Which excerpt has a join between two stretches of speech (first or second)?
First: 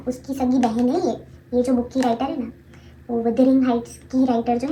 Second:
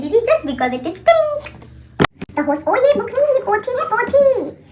second